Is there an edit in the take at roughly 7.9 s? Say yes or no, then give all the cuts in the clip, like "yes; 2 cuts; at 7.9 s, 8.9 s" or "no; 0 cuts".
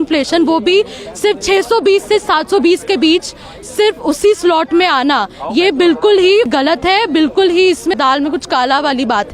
yes; 2 cuts; at 6.5 s, 7.9 s